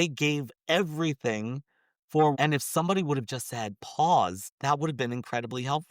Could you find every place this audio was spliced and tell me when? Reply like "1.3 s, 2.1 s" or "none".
2.4 s, 4.5 s